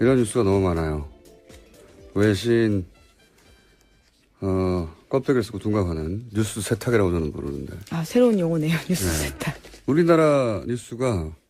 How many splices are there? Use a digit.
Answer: 1